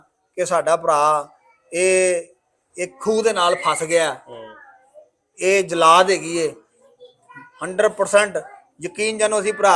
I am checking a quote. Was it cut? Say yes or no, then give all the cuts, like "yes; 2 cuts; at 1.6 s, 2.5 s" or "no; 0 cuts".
no; 0 cuts